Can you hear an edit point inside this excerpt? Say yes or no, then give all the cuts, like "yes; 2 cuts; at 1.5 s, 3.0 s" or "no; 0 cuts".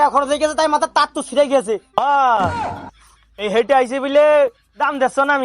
yes; 1 cut; at 1.9 s